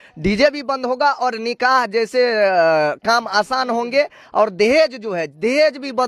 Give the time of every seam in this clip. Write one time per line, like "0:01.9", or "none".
none